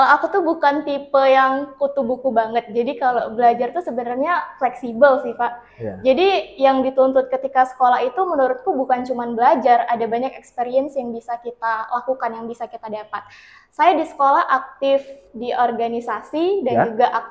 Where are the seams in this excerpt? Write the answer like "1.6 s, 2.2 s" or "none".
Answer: none